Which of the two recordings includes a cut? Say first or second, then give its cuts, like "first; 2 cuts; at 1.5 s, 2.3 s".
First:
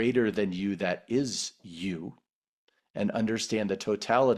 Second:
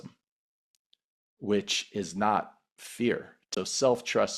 second; 1 cut; at 3.4 s